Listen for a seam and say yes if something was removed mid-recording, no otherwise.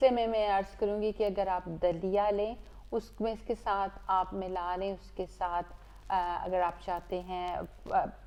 no